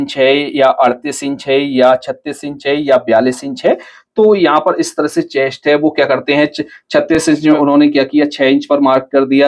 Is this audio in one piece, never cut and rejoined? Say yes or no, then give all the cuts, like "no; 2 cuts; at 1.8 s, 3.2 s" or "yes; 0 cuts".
no; 1 cut; at 7.3 s